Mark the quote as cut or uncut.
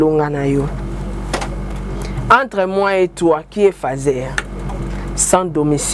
cut